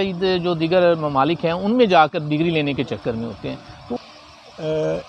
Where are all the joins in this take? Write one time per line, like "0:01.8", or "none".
0:04.0